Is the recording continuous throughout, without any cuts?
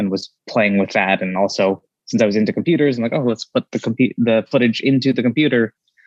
yes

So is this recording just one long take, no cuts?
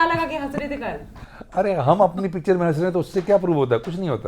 yes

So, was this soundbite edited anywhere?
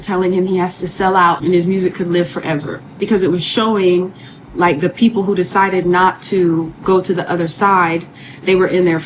yes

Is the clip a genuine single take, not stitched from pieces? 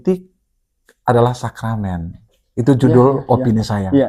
yes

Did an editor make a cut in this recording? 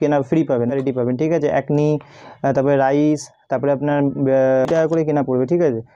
yes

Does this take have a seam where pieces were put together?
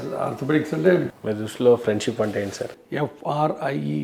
yes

